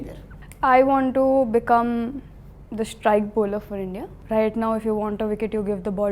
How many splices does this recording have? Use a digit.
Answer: 1